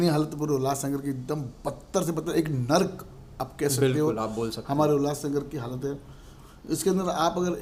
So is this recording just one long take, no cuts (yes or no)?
yes